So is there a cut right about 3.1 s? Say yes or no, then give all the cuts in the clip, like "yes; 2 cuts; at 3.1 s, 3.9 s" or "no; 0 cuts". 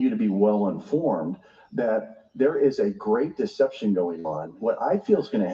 no; 1 cut; at 4.6 s